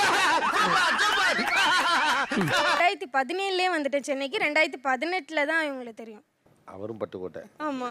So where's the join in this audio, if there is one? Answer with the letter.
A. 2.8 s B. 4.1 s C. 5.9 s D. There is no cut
A